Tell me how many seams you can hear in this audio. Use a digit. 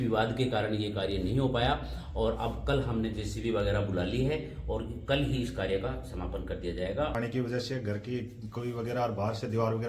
1